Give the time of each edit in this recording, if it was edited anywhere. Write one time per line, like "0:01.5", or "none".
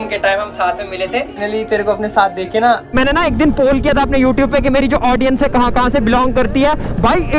0:01.4
0:02.9